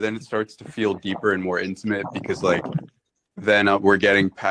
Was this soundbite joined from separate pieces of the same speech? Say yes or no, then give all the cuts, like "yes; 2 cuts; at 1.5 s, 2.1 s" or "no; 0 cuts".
no; 0 cuts